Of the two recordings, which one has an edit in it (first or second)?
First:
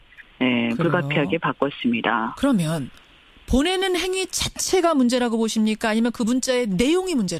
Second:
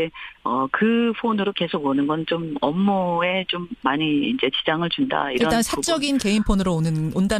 first